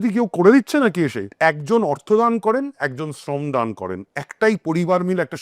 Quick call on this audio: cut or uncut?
cut